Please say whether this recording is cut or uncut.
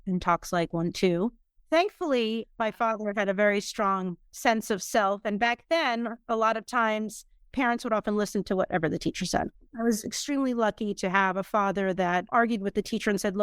cut